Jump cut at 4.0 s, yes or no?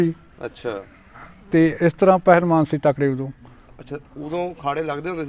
no